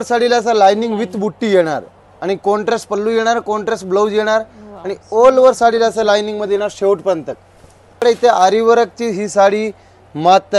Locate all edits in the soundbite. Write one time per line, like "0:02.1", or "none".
0:08.0

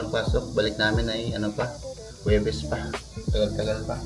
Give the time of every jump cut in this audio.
none

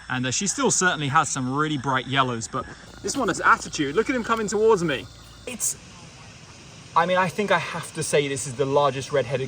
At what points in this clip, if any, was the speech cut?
0:02.8
0:05.5

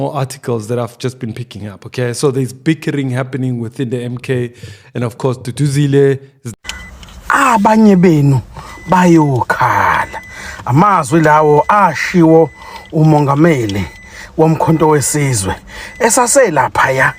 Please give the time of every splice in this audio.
0:06.6

